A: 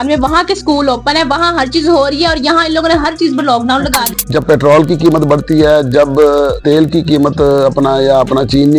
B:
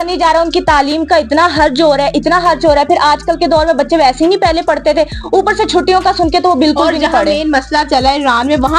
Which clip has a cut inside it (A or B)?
A